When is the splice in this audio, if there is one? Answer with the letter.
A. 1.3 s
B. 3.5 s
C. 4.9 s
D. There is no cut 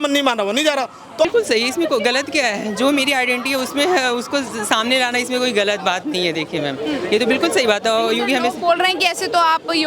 A